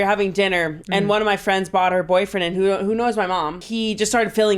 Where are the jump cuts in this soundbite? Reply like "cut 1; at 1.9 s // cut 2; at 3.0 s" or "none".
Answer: cut 1; at 3.6 s